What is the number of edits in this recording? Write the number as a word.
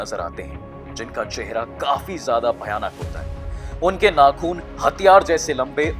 zero